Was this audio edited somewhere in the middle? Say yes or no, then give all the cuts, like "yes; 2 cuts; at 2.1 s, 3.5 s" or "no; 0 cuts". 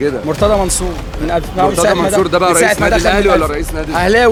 no; 0 cuts